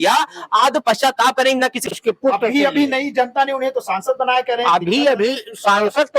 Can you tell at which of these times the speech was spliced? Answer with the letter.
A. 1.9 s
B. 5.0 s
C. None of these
A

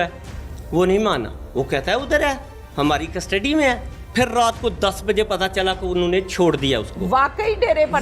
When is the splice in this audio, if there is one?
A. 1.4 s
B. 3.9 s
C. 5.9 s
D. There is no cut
B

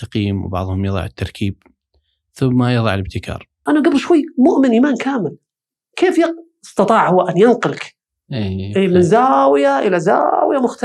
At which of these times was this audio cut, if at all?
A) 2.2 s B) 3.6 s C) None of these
B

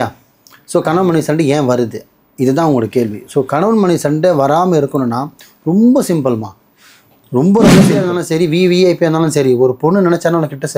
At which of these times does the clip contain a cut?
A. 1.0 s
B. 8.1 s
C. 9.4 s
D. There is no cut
B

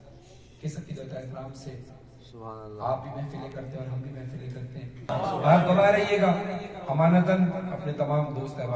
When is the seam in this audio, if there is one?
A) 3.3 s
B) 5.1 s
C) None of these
B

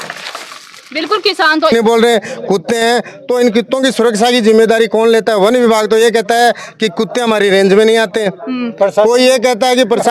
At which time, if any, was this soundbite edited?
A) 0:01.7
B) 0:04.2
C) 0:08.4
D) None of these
A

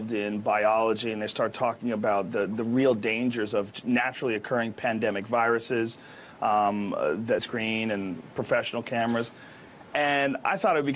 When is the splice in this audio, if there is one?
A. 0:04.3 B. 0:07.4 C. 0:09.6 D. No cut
D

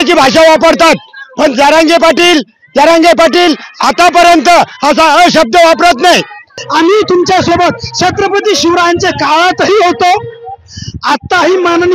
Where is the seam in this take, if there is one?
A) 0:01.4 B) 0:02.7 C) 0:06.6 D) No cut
C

